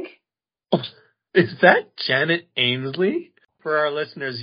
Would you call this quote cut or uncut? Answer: cut